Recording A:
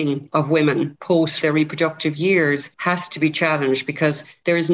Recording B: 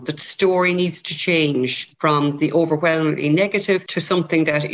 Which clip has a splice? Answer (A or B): A